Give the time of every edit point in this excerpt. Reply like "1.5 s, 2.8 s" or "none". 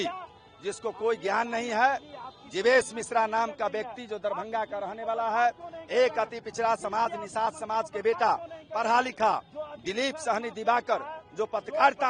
none